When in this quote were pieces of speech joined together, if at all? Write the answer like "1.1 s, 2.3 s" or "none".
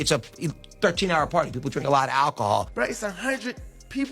2.7 s